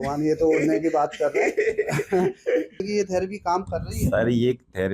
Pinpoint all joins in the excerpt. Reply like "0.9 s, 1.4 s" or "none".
2.8 s